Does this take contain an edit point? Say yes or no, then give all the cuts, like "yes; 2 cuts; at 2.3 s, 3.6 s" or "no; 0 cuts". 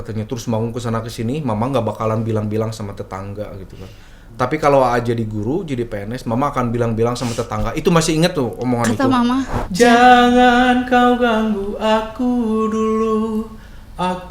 yes; 1 cut; at 9.5 s